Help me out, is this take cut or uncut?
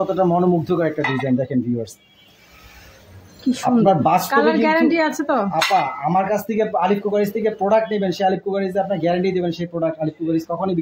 uncut